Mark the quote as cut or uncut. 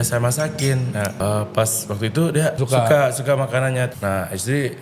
cut